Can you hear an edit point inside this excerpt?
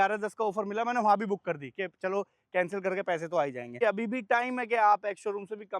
yes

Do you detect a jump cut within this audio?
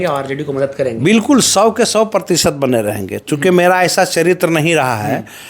no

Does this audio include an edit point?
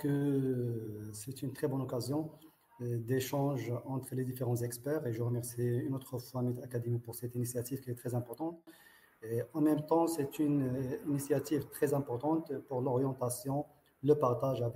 no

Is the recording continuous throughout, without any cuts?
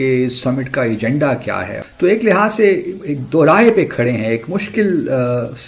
no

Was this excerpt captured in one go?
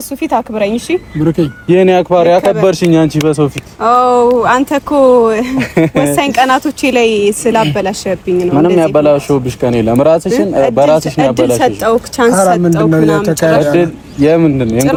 yes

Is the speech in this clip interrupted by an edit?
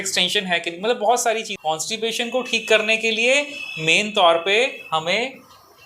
yes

